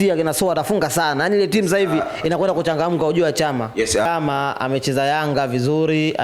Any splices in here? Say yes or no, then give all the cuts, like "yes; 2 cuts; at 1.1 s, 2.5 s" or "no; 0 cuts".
yes; 1 cut; at 4.1 s